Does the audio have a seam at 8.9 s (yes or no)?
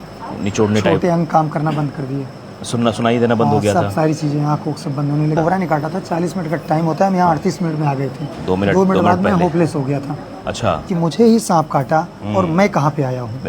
no